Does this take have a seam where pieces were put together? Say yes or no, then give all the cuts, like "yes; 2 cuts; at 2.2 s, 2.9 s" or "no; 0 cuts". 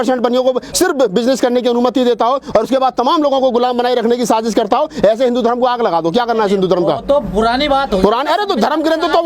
no; 0 cuts